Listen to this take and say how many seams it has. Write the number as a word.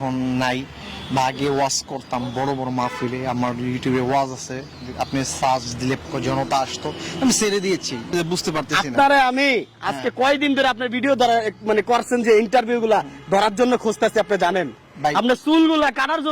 two